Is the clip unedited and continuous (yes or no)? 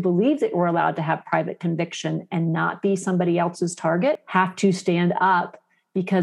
no